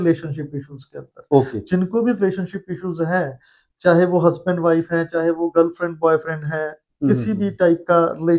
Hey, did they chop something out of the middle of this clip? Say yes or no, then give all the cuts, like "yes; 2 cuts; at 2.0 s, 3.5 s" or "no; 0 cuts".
no; 0 cuts